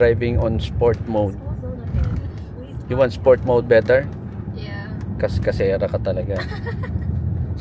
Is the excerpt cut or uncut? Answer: uncut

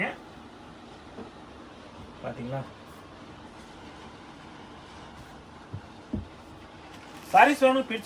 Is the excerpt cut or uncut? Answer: uncut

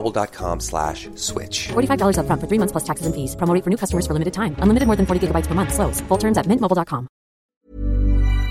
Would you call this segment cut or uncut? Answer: cut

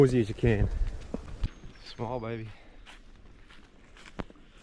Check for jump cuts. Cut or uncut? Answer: cut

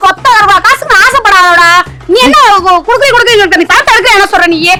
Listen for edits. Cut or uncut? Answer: uncut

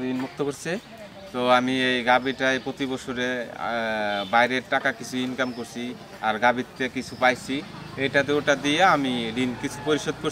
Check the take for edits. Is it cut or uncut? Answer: uncut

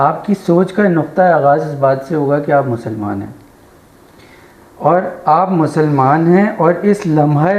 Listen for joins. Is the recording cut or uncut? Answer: uncut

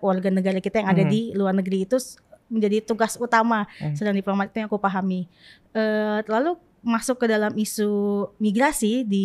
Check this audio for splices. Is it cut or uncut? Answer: uncut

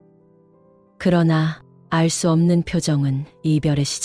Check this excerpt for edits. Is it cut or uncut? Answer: cut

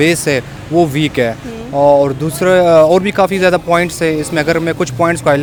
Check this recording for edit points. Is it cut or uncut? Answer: uncut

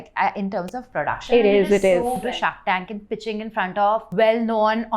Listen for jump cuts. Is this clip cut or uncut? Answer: cut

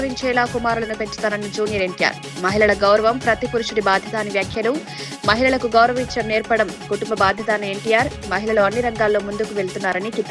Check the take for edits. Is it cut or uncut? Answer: uncut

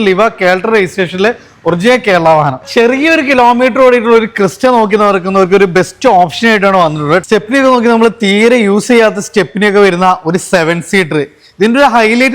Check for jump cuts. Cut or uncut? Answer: cut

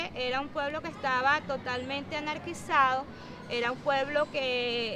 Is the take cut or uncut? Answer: uncut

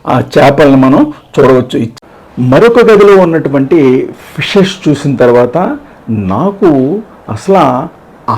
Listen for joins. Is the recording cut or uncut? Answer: cut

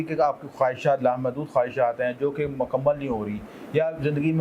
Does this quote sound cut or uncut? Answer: uncut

